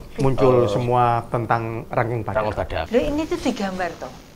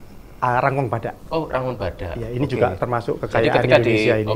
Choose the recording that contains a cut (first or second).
first